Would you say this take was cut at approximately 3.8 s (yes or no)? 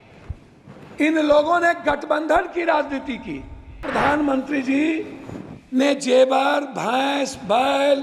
yes